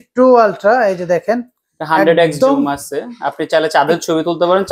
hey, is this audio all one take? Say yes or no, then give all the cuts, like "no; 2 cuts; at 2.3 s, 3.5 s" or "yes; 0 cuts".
yes; 0 cuts